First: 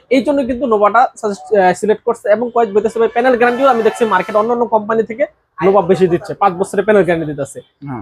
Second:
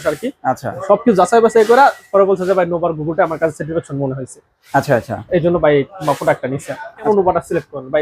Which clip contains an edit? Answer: second; 1 cut; at 6.9 s

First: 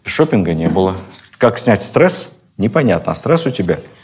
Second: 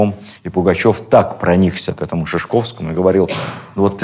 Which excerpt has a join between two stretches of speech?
first; 1 cut; at 1.2 s

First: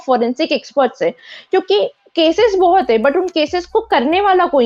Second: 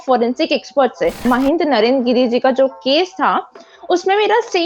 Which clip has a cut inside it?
second; 1 cut; at 1.2 s

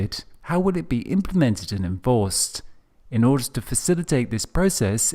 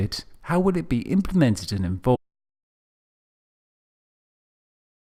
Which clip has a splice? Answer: first; 1 cut; at 2.2 s

